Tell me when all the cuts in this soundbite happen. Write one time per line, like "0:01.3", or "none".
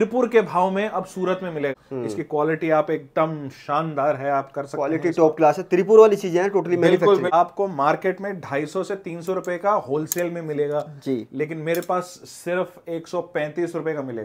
0:01.7
0:07.3